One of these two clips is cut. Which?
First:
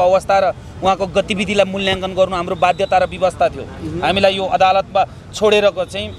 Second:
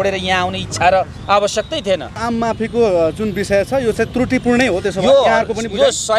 second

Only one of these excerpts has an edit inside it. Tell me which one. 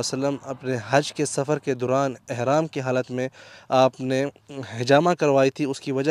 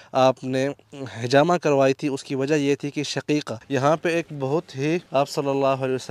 second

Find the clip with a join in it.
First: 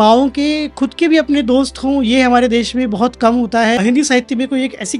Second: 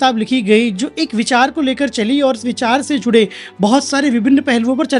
first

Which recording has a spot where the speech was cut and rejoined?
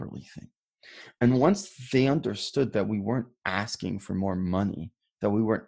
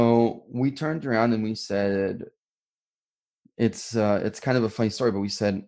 second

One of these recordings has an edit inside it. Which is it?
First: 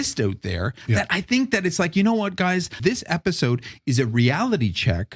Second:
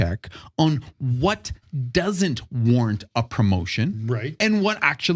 first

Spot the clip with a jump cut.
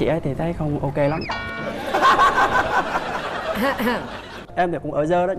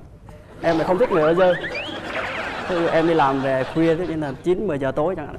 first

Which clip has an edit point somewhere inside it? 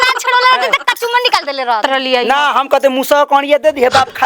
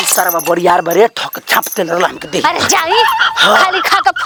first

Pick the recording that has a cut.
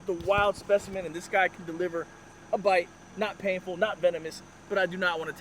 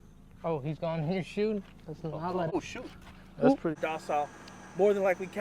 second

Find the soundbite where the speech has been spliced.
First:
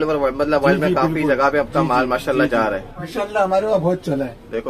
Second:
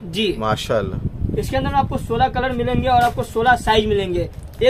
first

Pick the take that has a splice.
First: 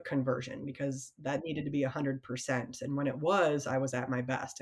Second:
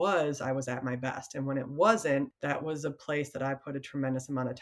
second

